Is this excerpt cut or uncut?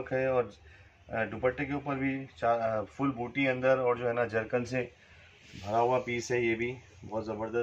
uncut